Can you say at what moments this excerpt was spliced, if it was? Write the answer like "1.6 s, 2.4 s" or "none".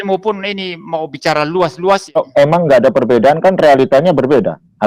2.2 s